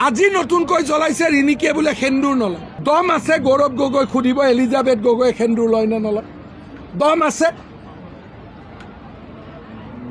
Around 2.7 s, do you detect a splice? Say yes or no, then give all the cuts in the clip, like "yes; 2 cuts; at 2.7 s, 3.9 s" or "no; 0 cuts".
yes; 1 cut; at 2.7 s